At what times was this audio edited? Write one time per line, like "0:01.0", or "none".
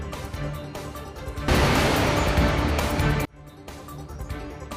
0:01.5
0:03.2